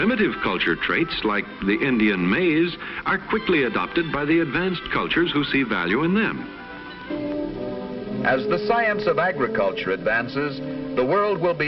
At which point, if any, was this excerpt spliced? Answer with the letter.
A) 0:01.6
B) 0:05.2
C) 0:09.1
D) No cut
D